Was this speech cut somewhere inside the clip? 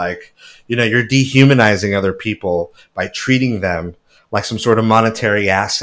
no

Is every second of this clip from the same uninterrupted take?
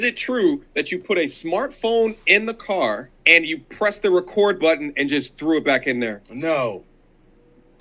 yes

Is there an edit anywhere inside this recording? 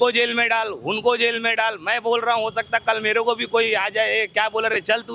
no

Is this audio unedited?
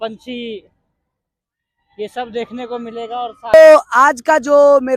yes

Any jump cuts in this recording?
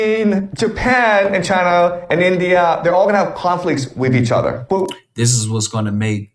no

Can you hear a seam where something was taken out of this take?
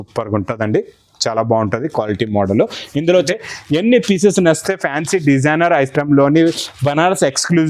yes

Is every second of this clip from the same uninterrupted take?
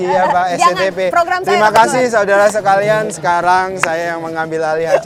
yes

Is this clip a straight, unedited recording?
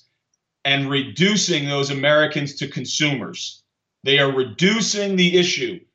yes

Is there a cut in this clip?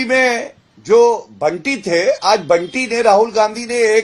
no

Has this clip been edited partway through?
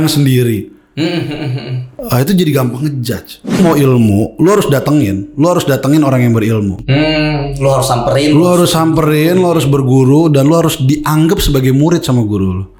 yes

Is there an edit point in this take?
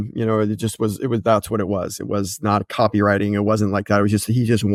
no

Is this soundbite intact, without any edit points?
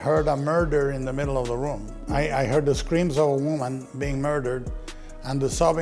no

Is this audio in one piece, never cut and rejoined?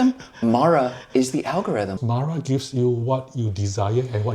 no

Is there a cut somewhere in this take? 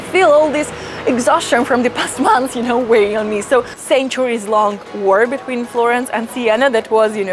yes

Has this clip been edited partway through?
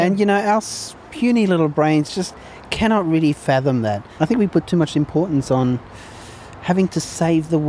yes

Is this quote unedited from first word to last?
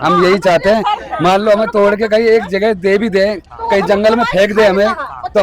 yes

